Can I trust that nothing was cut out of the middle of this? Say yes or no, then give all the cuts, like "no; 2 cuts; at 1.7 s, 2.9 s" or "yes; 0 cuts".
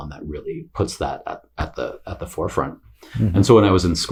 yes; 0 cuts